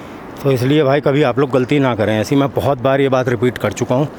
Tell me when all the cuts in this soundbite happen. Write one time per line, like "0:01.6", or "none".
none